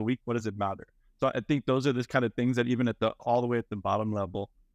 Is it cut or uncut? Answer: cut